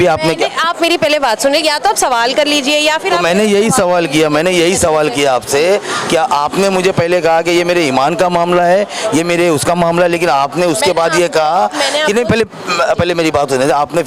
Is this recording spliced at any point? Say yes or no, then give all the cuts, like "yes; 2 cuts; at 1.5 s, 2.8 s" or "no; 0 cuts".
no; 0 cuts